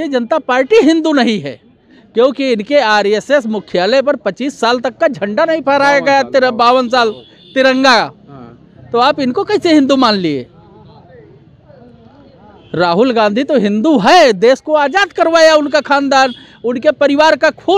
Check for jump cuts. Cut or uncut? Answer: uncut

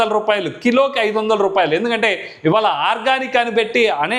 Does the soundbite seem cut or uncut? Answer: uncut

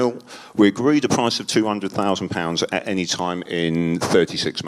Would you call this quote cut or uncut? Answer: uncut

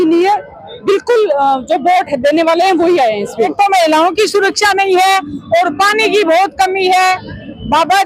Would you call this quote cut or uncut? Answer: cut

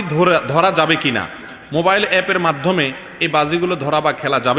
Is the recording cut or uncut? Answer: uncut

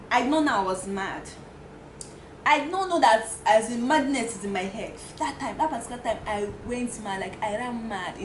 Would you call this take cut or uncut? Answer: uncut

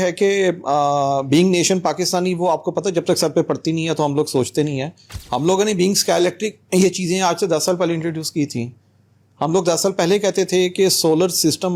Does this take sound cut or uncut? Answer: uncut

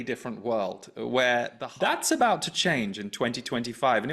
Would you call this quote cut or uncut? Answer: cut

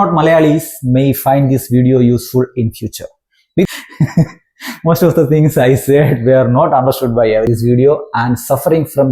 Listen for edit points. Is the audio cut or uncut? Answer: cut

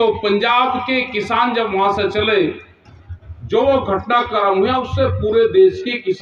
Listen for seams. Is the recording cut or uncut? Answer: uncut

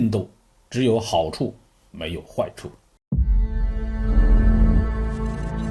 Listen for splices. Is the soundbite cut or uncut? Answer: cut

